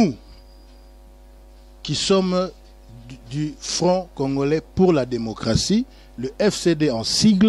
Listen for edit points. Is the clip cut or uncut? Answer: uncut